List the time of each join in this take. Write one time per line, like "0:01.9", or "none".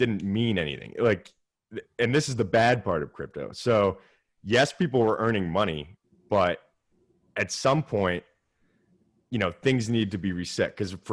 none